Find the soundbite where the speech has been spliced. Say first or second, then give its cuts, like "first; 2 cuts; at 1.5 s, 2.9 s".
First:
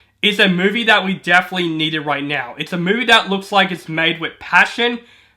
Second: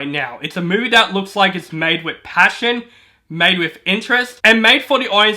second; 1 cut; at 4.3 s